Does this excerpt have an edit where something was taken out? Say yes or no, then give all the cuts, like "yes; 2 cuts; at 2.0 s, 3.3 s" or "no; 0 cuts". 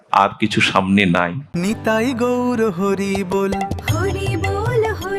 yes; 1 cut; at 1.5 s